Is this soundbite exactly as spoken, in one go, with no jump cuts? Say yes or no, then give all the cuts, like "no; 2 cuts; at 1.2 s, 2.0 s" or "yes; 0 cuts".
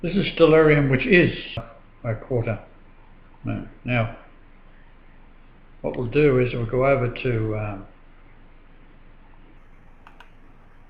yes; 0 cuts